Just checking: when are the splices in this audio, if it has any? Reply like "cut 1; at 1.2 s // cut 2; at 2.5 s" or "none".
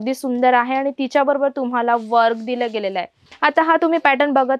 cut 1; at 3.2 s